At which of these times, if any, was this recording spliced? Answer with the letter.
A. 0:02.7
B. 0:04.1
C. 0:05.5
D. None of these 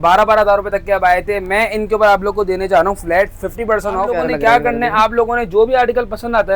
B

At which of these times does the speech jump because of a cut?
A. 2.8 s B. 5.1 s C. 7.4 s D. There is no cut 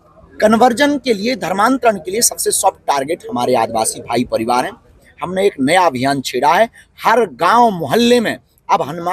B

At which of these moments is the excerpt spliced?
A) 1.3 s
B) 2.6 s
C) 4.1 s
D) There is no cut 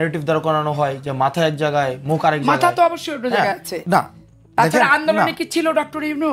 D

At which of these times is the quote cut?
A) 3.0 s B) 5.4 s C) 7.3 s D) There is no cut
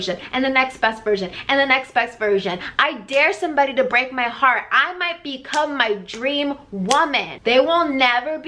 C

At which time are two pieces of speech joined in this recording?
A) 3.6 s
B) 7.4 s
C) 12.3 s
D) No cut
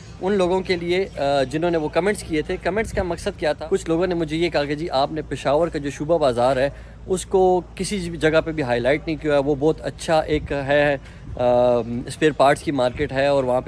A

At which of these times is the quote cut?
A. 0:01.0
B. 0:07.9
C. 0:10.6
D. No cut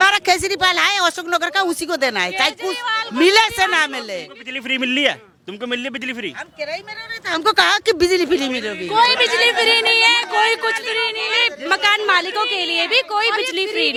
D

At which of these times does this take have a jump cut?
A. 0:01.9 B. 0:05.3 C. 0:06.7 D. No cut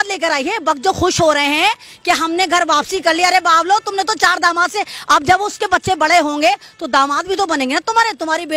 D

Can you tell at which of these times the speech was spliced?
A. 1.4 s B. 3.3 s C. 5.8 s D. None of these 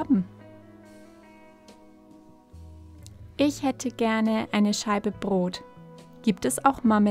D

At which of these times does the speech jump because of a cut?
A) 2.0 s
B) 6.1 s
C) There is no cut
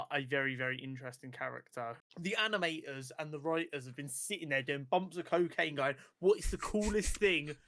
A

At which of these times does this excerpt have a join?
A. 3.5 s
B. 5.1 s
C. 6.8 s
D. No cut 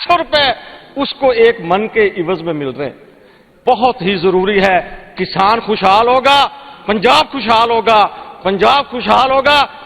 A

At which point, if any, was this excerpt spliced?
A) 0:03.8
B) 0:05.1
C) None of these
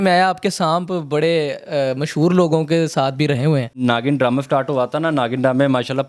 A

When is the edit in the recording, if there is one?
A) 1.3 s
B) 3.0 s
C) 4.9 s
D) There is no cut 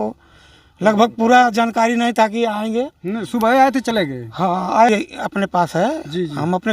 C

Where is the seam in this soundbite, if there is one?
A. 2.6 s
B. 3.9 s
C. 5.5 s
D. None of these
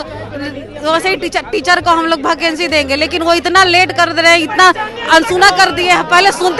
D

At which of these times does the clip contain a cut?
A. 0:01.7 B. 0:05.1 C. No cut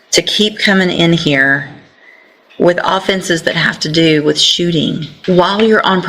B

